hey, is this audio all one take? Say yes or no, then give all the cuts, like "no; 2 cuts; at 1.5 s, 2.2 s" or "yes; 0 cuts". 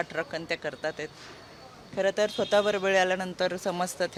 yes; 0 cuts